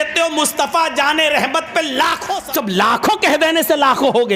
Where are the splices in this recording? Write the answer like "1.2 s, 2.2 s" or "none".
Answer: 2.3 s